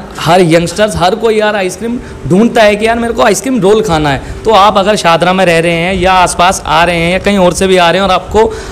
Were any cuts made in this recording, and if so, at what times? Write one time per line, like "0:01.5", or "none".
none